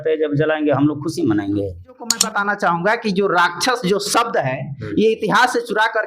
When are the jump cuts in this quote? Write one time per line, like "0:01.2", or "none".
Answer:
0:02.2